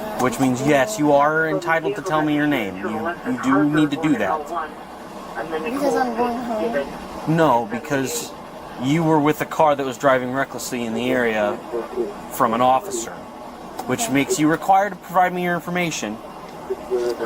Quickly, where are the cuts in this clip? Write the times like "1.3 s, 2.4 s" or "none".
none